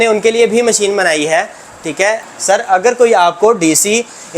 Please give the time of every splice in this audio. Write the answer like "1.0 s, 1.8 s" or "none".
2.3 s

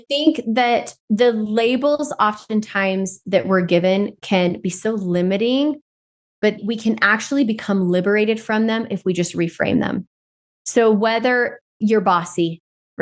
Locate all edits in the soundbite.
0.9 s

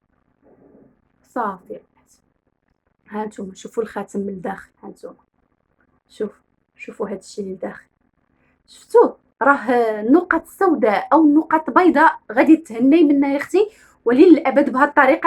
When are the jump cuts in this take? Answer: none

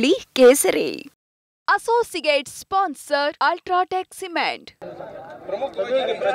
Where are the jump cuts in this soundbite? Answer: 4.7 s

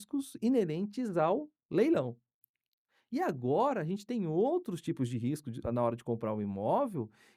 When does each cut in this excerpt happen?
none

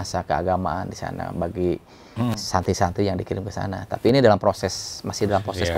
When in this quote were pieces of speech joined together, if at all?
none

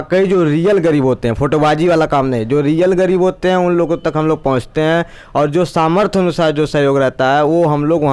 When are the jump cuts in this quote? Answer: none

